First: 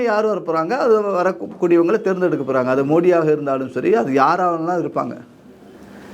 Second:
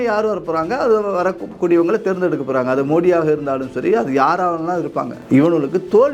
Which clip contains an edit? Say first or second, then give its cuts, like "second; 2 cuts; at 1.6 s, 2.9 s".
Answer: second; 1 cut; at 5.2 s